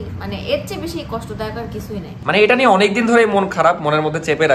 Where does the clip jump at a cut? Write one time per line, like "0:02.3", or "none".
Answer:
0:02.1